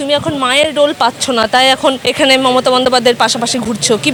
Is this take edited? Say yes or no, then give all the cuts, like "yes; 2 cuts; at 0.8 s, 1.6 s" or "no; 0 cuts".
no; 0 cuts